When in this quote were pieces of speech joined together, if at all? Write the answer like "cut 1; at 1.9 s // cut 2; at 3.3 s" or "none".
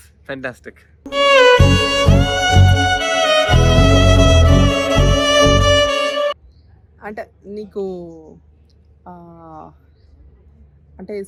none